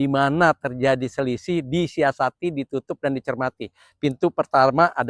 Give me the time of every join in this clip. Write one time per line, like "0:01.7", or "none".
none